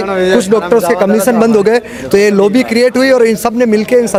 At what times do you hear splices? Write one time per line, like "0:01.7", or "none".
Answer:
none